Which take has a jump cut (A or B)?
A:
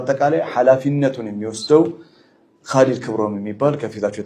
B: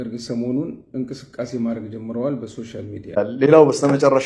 B